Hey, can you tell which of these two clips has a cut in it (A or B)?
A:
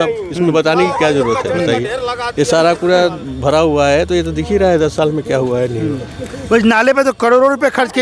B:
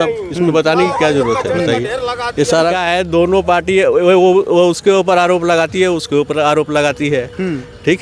B